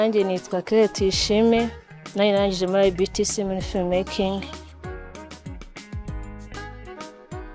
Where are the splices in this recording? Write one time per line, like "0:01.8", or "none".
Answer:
none